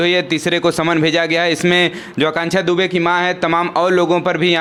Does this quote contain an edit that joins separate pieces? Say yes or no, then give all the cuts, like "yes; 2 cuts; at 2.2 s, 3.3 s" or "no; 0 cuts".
no; 0 cuts